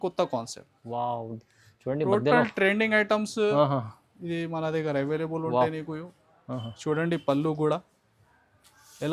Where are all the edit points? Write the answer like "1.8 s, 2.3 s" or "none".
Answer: none